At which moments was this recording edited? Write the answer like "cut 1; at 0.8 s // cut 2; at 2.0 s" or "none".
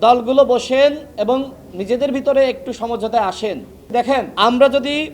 cut 1; at 4.2 s